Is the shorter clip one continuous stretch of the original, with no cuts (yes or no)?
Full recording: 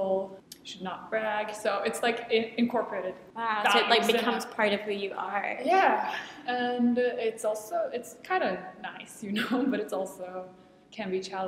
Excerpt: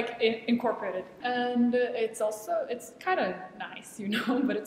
no